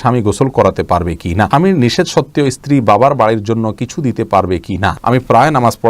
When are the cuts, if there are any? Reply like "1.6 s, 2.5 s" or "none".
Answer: 1.5 s, 4.9 s